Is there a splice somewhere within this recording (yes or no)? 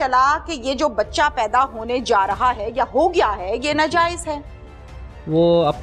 no